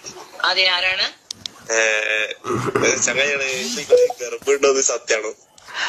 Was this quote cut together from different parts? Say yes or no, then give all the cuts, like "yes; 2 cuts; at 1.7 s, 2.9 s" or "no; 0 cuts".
no; 0 cuts